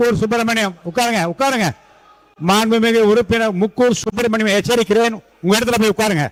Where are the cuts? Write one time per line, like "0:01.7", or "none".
none